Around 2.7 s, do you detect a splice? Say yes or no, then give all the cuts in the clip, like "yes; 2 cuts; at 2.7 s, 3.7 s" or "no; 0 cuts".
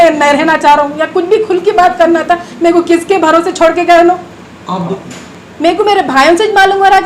no; 1 cut; at 4.9 s